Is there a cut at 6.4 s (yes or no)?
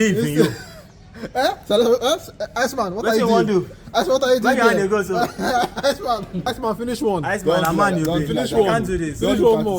yes